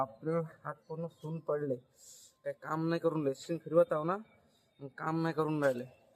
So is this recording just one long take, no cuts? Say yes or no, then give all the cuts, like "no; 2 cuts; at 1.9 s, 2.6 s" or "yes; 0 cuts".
yes; 0 cuts